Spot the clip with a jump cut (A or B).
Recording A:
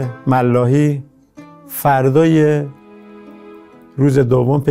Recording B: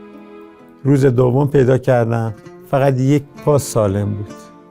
B